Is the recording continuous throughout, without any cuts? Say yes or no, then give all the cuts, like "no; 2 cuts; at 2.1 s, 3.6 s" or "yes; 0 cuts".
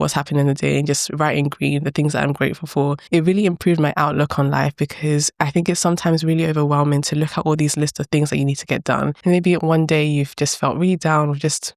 no; 2 cuts; at 3.0 s, 9.2 s